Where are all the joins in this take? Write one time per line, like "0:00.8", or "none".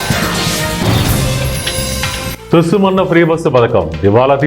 0:02.4